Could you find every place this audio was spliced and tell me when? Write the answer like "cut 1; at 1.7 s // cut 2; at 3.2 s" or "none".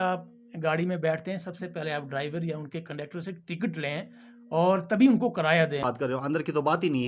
cut 1; at 5.9 s